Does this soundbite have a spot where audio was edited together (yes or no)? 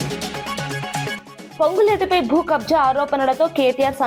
yes